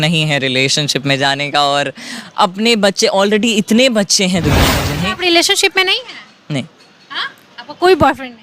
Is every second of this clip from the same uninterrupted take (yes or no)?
yes